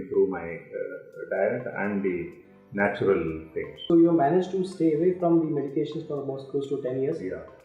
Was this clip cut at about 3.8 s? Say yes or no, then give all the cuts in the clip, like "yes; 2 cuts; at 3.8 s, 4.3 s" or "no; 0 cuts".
yes; 1 cut; at 3.8 s